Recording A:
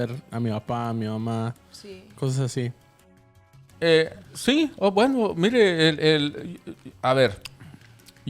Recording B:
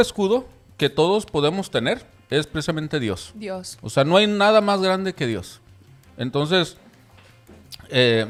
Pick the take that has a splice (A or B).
A